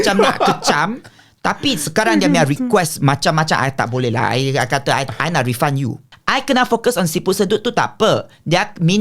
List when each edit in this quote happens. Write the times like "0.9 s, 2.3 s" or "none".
6.0 s